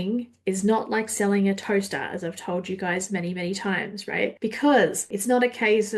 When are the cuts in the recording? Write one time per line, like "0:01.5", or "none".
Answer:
0:04.3
0:05.1